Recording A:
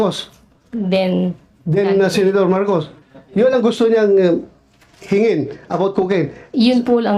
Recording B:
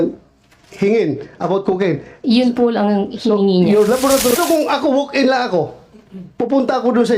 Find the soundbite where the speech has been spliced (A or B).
B